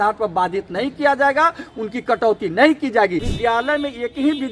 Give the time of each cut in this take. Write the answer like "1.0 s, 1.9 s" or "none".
3.3 s